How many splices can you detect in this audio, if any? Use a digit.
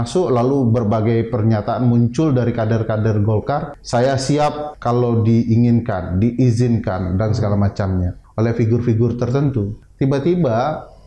4